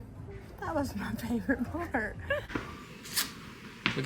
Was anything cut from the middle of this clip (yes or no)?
yes